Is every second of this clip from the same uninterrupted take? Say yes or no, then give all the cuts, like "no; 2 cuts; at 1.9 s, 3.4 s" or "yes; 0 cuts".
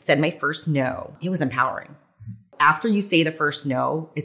no; 2 cuts; at 1.2 s, 2.5 s